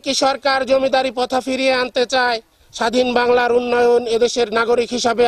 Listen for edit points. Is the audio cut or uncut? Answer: uncut